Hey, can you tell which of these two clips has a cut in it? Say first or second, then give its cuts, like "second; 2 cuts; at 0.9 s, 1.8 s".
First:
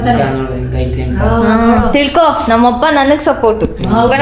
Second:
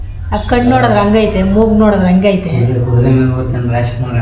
second; 1 cut; at 3.1 s